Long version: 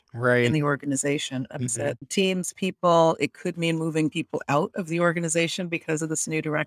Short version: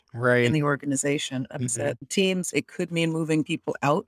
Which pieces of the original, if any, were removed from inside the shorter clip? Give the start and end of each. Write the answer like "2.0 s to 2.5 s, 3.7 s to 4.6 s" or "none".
2.5 s to 3.2 s

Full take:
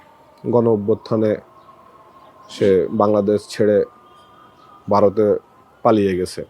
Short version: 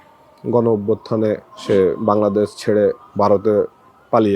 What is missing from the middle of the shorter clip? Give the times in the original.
1.5 s to 2.4 s, 4.0 s to 4.8 s

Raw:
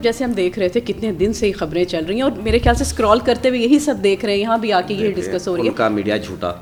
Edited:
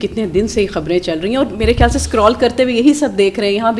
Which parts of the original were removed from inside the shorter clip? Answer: none

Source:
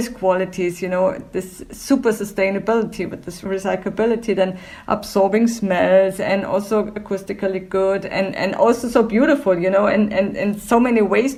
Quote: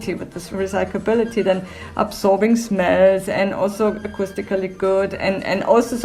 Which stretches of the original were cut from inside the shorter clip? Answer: none

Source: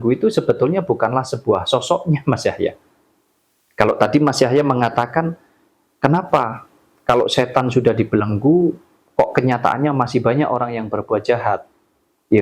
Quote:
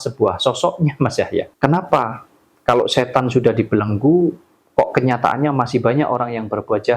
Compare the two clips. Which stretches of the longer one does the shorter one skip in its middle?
2.8 s to 5.9 s

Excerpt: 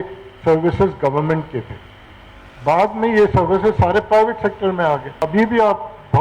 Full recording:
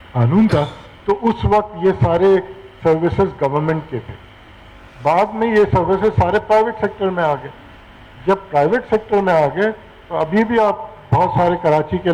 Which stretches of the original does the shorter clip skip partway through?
7.5 s to 10.1 s

